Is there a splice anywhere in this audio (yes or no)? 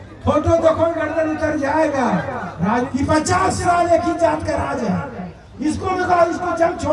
yes